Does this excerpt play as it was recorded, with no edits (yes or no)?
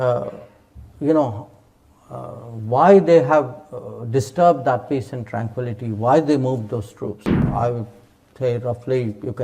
no